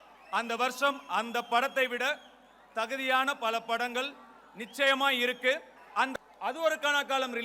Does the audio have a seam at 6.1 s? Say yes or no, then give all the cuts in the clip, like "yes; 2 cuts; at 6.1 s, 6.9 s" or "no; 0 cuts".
yes; 1 cut; at 6.1 s